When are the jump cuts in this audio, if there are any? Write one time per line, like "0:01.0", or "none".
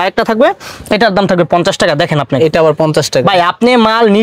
none